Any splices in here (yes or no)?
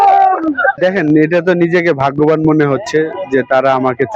no